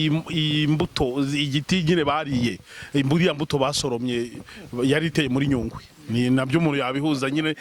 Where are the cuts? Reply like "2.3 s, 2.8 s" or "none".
none